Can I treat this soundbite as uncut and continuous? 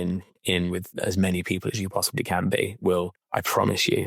yes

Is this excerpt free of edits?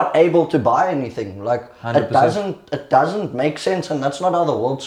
yes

